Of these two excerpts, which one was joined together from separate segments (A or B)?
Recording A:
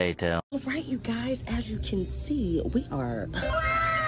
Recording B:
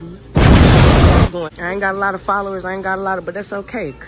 B